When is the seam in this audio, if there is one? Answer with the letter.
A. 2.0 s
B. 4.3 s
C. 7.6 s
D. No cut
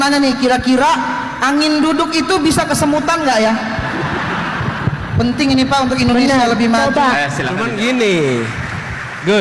C